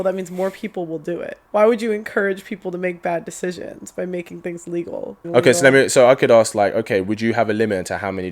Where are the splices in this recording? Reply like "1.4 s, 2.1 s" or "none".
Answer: 1.4 s, 5.2 s